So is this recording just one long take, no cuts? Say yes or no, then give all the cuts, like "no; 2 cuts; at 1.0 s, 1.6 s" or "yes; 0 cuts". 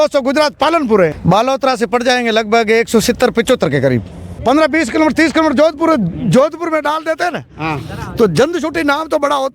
no; 2 cuts; at 1.2 s, 4.3 s